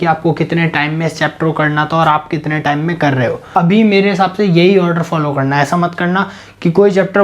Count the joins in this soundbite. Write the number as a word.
one